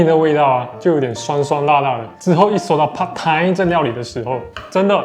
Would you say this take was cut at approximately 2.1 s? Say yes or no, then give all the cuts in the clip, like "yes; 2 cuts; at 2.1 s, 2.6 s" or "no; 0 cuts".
yes; 1 cut; at 2.1 s